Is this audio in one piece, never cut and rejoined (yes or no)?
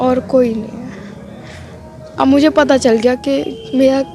yes